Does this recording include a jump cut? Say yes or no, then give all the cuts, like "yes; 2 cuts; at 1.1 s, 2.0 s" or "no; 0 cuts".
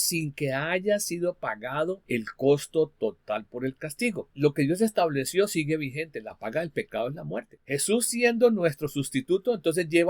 yes; 3 cuts; at 2.0 s, 4.3 s, 7.6 s